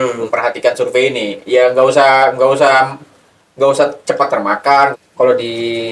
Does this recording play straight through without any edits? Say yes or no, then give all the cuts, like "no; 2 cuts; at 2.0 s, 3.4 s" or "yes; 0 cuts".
no; 1 cut; at 4.9 s